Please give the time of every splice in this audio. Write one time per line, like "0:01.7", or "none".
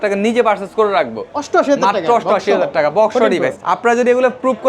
0:01.2
0:03.6